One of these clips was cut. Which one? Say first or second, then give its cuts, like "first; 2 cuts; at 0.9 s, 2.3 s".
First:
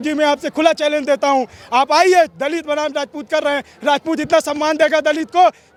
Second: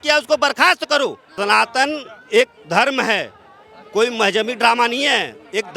second; 1 cut; at 1.3 s